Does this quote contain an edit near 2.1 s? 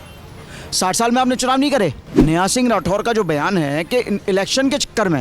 yes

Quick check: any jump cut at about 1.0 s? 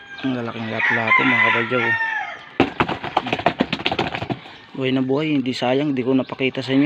no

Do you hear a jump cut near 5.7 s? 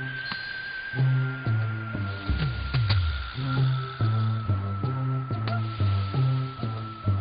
yes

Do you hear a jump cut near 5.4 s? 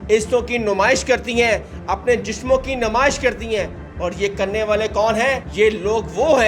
yes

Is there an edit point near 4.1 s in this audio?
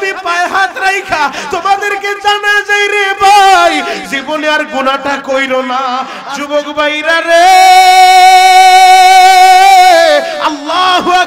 no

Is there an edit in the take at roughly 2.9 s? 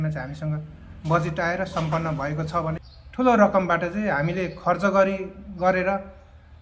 yes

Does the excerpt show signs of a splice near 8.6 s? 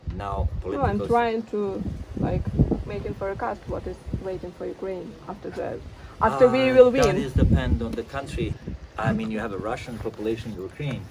yes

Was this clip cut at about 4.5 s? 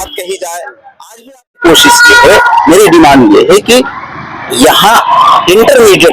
no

